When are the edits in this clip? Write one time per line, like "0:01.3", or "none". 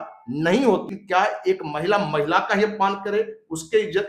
0:01.0

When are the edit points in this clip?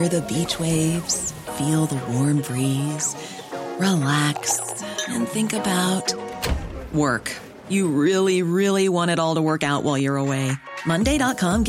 none

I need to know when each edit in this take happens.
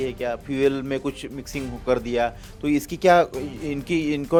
none

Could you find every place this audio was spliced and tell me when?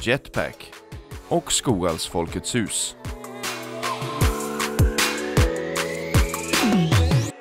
0:02.9

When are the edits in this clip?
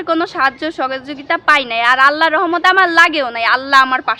none

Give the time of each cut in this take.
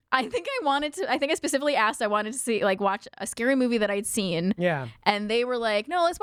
none

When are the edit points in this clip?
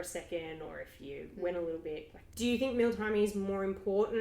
0:02.2

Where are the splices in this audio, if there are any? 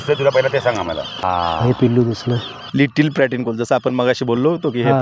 0:01.2
0:02.5

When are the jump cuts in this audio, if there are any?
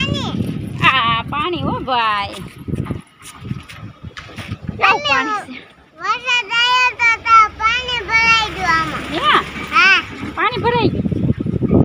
none

